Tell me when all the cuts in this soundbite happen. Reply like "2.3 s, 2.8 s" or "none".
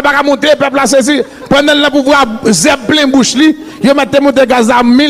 1.3 s